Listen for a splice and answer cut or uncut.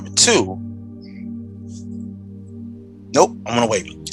uncut